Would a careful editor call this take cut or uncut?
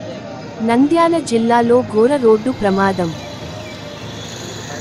uncut